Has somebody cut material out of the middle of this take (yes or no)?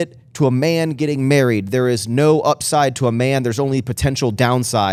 no